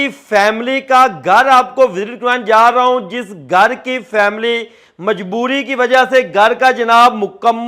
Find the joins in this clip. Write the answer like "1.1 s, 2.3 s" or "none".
none